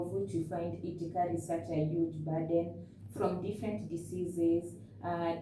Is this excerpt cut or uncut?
uncut